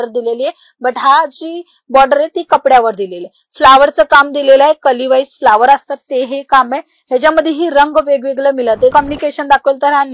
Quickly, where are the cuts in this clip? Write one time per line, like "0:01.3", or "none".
0:08.9